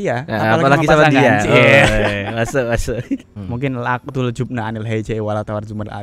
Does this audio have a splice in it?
yes; 1 cut; at 3.4 s

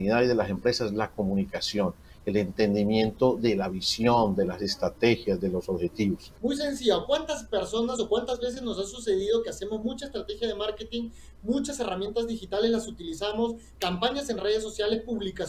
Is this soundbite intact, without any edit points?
no; 1 cut; at 6.3 s

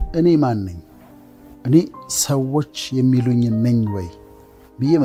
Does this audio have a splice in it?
no; 0 cuts

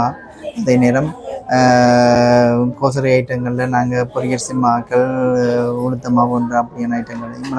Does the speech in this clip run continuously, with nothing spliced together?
yes; 0 cuts

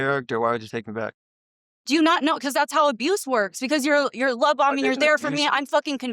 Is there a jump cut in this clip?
no; 0 cuts

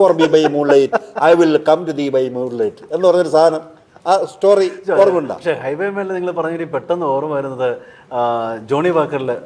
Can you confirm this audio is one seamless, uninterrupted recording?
yes; 0 cuts

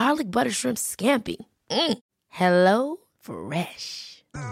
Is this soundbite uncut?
yes; 0 cuts

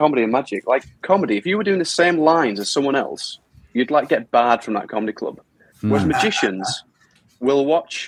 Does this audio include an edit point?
yes; 1 cut; at 1.0 s

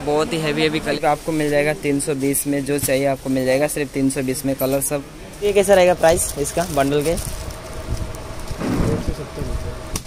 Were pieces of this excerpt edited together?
yes; 2 cuts; at 1.0 s, 5.5 s

